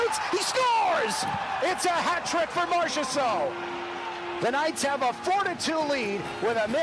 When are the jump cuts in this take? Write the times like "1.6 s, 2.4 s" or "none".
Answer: none